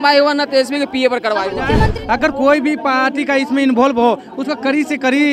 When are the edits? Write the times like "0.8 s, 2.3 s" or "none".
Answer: 1.7 s